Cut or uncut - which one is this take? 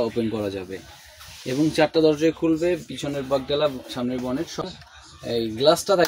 cut